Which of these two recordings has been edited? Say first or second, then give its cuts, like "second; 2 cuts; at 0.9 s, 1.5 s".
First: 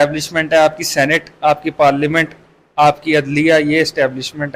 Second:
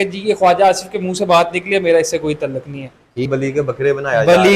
second; 1 cut; at 3.3 s